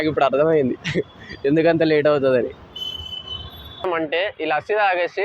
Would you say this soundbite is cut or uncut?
cut